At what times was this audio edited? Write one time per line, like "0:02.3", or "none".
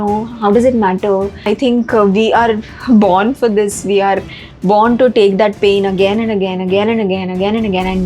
0:01.4